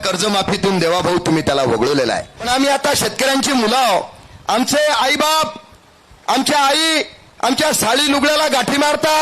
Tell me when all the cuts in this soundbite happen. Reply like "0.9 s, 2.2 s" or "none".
2.3 s